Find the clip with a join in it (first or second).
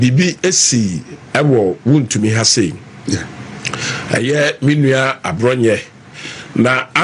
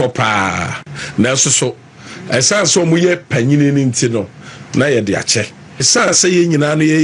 second